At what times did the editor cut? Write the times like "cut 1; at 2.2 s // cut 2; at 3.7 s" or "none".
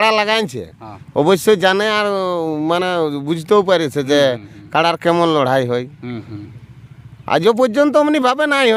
none